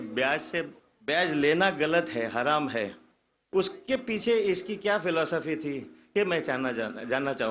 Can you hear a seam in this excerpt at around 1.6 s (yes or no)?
yes